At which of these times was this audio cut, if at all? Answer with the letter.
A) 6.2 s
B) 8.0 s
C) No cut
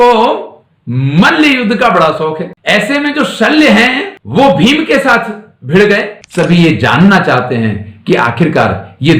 A